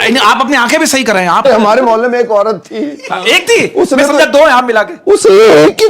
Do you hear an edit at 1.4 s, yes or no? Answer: yes